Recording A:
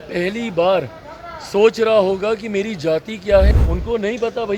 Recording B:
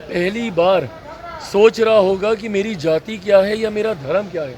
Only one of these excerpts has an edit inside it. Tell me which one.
A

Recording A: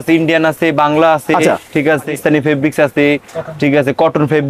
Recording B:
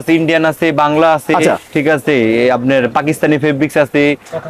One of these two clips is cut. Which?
A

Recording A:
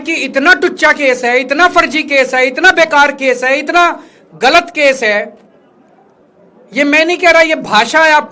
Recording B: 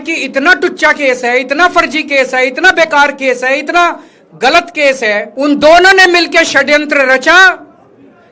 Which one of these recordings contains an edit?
B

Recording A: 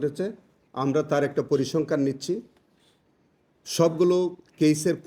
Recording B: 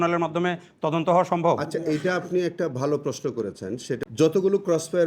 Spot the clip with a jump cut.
B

